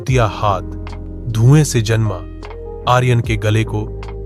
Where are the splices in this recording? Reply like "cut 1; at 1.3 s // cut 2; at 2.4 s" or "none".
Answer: none